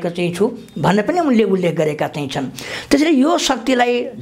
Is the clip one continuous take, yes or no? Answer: yes